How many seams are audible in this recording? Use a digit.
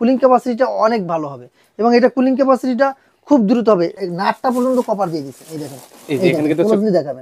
1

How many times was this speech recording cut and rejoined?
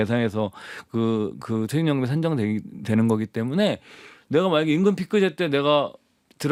0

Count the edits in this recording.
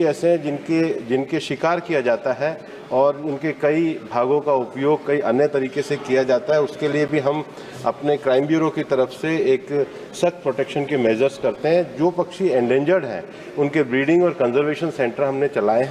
0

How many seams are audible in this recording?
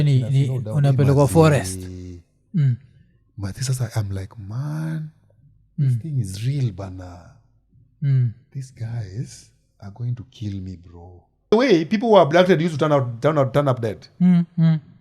1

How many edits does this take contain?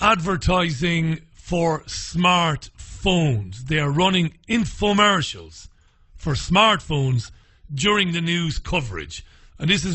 1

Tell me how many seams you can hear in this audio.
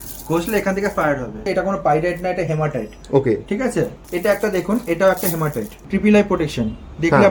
3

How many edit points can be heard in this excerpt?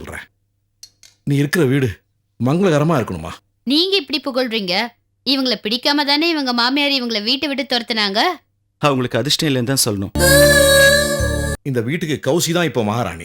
1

